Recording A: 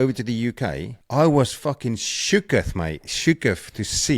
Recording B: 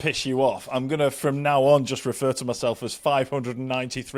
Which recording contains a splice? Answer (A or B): A